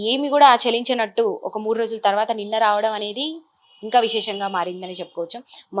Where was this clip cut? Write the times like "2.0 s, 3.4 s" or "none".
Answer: none